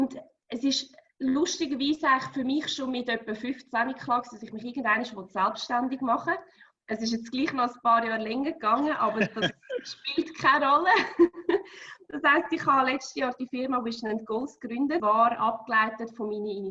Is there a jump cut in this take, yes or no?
yes